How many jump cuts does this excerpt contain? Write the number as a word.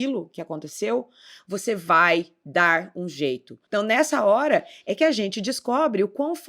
one